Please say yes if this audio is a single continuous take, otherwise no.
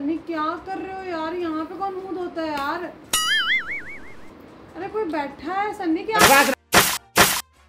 yes